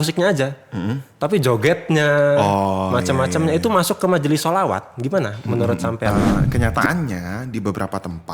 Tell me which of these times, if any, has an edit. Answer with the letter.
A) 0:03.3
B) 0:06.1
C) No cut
B